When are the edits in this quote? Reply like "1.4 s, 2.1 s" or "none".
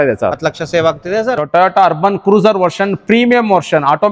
1.3 s